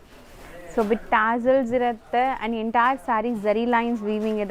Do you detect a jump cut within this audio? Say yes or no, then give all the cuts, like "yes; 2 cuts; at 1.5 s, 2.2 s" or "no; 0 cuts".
no; 0 cuts